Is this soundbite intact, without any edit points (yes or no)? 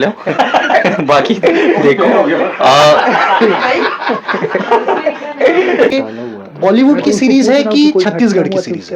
no